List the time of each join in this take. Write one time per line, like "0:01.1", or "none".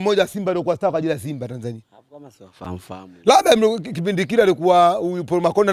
none